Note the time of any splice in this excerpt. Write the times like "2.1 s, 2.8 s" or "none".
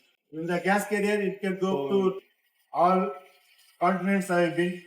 2.2 s